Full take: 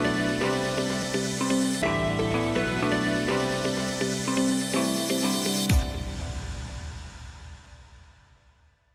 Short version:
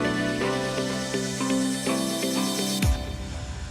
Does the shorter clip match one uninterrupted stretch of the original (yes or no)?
no